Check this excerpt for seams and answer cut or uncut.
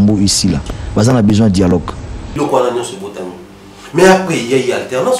cut